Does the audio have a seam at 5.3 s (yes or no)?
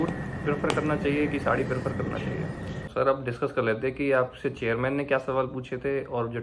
no